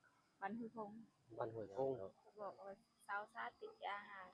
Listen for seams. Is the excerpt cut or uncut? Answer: cut